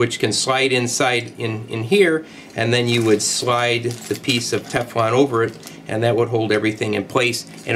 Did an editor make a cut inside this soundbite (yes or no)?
no